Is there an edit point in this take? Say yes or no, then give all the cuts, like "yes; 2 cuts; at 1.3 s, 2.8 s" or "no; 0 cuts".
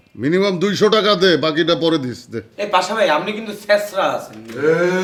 no; 0 cuts